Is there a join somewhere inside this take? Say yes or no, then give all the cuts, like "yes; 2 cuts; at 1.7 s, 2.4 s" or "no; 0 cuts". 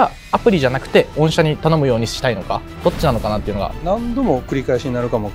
yes; 2 cuts; at 2.7 s, 3.8 s